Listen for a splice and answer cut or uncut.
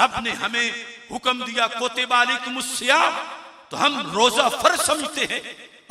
uncut